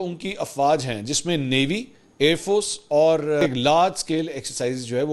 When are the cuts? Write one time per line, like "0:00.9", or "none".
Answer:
0:03.4